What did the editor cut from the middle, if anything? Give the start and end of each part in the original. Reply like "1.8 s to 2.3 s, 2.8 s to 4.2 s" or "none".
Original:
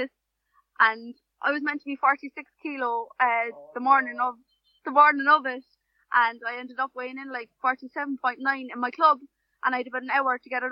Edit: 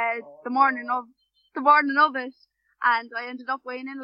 none